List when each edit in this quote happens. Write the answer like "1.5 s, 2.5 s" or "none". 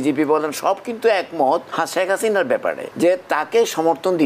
1.7 s, 2.9 s